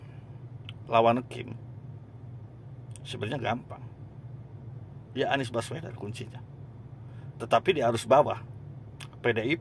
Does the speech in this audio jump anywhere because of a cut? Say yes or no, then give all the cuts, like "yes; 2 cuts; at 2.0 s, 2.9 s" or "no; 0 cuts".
no; 0 cuts